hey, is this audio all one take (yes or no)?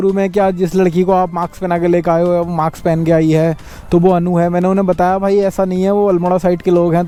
yes